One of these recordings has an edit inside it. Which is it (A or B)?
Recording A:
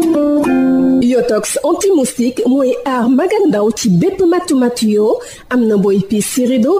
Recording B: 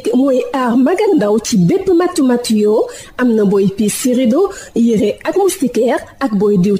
A